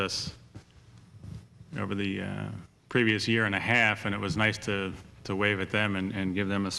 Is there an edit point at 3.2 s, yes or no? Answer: yes